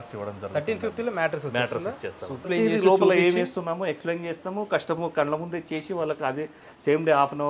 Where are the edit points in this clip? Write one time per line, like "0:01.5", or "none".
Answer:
0:02.5